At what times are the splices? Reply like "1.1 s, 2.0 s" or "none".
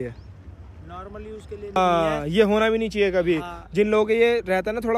1.8 s

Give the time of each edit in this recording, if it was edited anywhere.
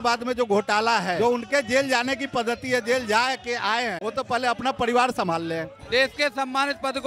1.1 s, 4.0 s, 5.8 s

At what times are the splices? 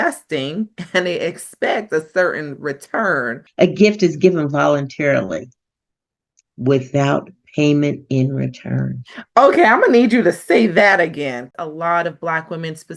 3.4 s, 11.4 s

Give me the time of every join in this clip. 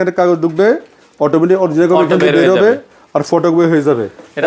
none

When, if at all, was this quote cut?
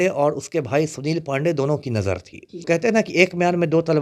2.7 s

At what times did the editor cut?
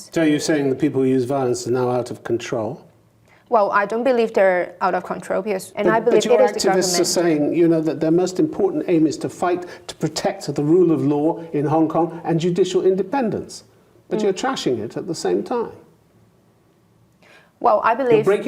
5.7 s

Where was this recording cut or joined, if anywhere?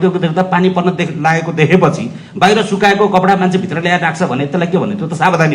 none

